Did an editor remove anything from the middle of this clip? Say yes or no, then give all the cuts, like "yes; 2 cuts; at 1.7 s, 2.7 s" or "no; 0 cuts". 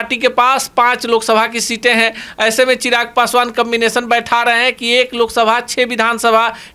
no; 0 cuts